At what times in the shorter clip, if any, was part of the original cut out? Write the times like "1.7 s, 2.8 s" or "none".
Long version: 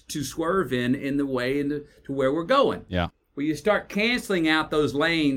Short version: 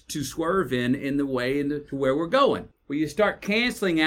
1.9 s, 2.7 s